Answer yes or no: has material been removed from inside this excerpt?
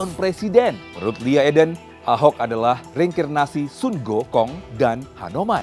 yes